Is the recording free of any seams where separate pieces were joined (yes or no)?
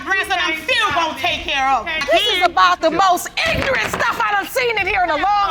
yes